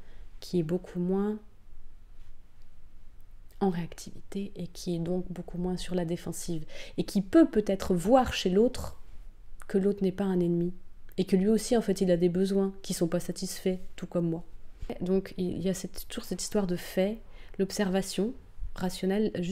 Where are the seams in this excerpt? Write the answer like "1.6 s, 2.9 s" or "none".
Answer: 15.0 s